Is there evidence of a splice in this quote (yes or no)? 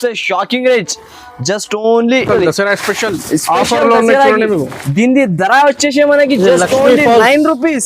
yes